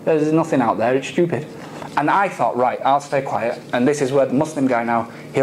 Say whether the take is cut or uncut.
uncut